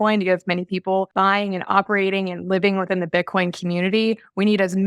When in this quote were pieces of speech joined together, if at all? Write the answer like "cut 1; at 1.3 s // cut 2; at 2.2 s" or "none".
cut 1; at 1.1 s